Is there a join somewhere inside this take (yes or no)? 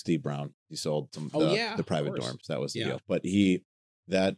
yes